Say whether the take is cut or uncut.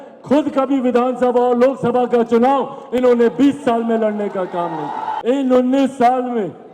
cut